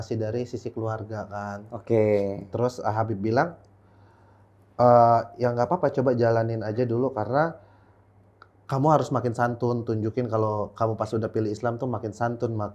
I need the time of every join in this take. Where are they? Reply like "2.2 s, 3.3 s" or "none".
none